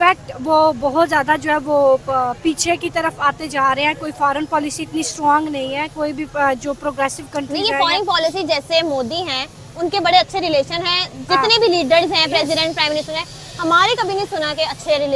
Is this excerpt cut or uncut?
uncut